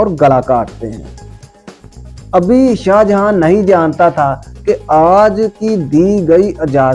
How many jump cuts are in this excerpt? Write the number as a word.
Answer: one